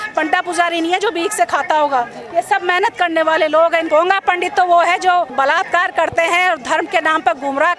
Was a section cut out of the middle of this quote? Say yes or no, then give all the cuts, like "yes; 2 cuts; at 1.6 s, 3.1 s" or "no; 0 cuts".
yes; 2 cuts; at 3.9 s, 5.3 s